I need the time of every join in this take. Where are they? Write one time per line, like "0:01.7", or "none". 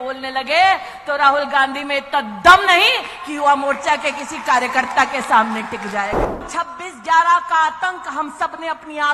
0:06.5